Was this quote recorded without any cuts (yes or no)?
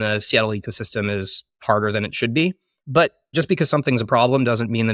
no